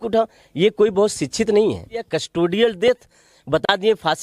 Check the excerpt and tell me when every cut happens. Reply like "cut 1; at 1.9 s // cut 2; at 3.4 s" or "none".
cut 1; at 2.2 s